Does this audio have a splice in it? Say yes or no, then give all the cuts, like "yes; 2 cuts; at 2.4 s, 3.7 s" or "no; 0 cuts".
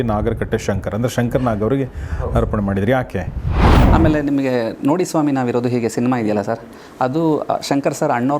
yes; 1 cut; at 3.8 s